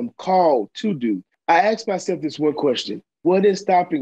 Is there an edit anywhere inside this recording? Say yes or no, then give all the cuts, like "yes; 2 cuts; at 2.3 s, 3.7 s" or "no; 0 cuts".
yes; 2 cuts; at 1.3 s, 3.2 s